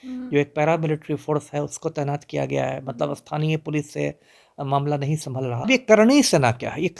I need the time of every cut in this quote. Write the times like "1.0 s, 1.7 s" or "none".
5.7 s